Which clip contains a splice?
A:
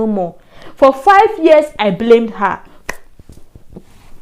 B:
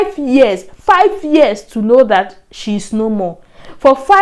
A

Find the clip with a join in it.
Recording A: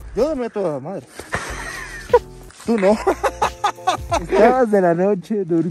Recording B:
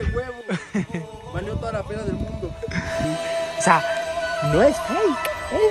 A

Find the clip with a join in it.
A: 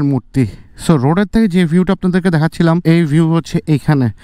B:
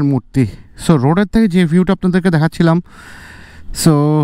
A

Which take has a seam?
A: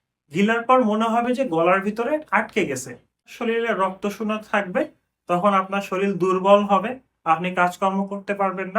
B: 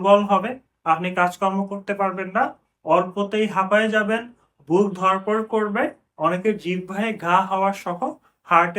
A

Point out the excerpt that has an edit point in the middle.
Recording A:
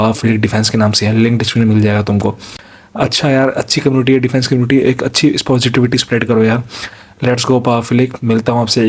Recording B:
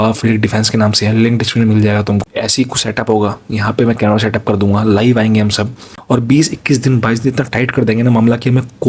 B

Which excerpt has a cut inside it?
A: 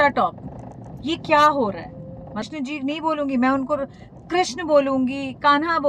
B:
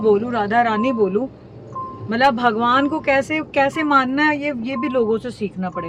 A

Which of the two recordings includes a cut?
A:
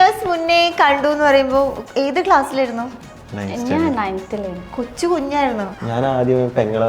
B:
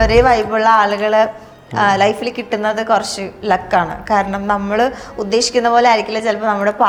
A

